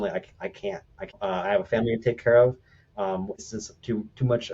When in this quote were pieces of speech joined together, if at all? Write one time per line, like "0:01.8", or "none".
0:01.2
0:03.4